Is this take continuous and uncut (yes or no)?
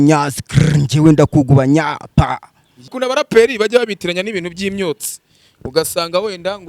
no